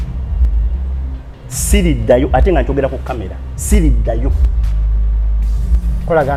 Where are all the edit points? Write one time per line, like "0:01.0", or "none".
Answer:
none